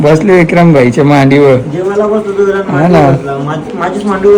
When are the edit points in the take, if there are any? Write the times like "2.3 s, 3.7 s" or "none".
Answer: none